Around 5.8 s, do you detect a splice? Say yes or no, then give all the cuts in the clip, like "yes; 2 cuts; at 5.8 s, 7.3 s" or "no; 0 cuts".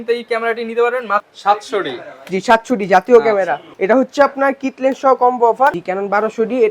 yes; 2 cuts; at 1.2 s, 5.8 s